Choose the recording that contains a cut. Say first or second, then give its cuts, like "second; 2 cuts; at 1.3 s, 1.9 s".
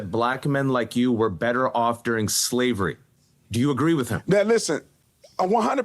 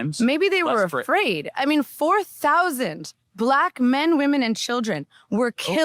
first; 1 cut; at 4.9 s